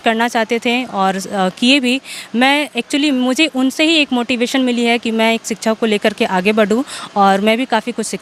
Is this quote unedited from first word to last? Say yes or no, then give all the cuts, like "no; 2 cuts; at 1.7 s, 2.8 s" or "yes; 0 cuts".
yes; 0 cuts